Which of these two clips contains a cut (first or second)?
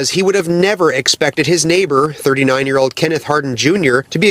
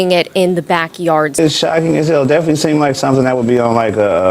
second